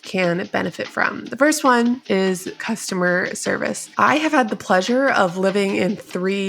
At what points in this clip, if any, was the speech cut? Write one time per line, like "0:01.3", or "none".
0:02.2
0:03.8